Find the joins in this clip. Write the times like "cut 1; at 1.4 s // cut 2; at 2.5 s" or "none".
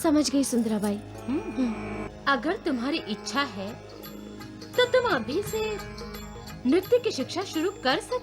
cut 1; at 2.1 s